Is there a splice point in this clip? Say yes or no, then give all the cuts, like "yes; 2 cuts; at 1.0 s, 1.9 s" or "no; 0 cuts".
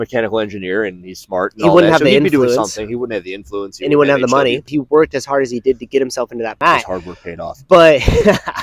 yes; 2 cuts; at 4.7 s, 6.5 s